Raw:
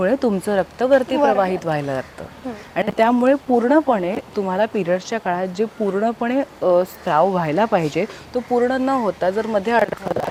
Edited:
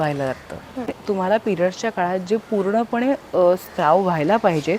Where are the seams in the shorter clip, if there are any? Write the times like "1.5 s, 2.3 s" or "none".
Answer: 0.9 s